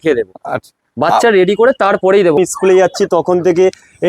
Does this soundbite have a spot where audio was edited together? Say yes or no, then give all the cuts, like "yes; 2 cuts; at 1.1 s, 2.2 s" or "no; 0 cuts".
yes; 1 cut; at 2.4 s